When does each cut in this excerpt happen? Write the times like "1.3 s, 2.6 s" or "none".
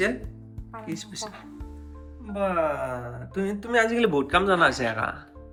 none